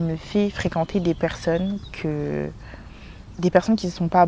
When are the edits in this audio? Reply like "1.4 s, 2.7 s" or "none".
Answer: none